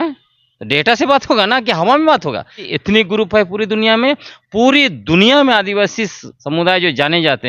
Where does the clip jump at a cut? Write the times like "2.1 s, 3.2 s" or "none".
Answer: none